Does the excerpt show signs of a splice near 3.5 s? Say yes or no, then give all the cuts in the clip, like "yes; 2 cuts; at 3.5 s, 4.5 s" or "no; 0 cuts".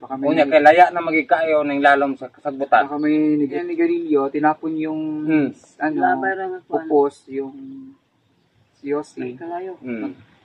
yes; 1 cut; at 3.5 s